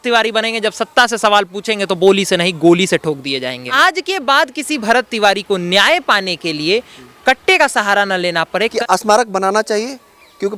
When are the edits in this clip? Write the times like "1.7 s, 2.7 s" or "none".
3.7 s, 8.7 s